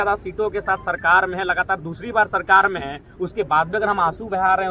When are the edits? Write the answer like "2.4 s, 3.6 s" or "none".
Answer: none